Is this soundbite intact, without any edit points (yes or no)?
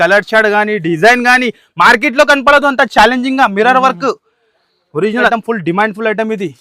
no